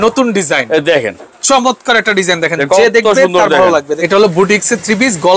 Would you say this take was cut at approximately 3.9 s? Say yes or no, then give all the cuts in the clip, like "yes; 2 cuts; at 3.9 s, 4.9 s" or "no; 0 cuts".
yes; 1 cut; at 3.9 s